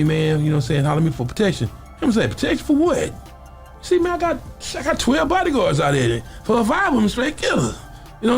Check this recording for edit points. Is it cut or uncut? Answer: cut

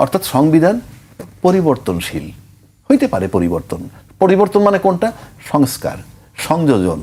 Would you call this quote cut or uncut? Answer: uncut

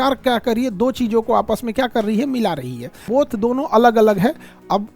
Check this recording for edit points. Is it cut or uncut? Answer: cut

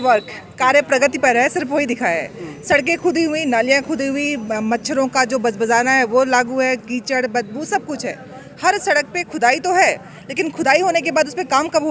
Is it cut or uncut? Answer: uncut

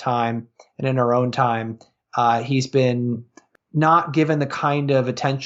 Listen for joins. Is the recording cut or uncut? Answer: cut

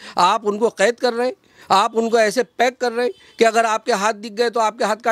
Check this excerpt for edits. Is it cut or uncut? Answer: uncut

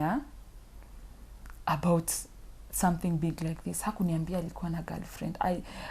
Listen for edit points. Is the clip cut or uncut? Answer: uncut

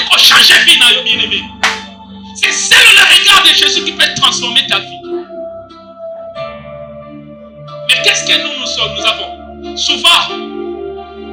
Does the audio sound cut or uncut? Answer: uncut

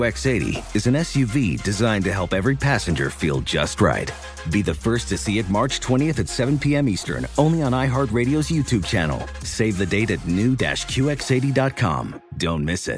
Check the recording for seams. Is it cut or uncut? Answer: uncut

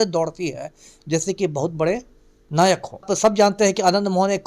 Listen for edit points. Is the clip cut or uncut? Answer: cut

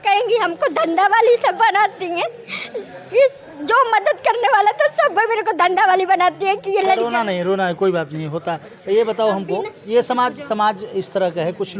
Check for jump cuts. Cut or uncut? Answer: uncut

